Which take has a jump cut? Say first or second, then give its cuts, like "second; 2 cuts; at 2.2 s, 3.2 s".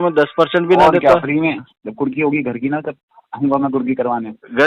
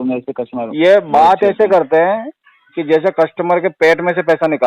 first; 1 cut; at 1.8 s